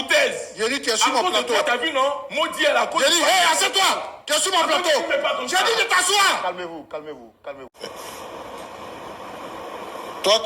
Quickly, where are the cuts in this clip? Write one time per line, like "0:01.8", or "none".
0:07.7